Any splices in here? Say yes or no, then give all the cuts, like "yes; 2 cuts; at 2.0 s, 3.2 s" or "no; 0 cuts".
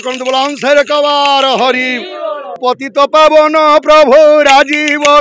yes; 1 cut; at 2.6 s